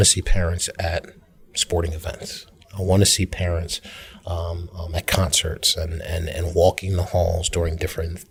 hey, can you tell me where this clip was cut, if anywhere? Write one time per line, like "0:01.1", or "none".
none